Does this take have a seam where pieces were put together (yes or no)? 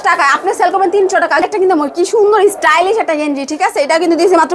yes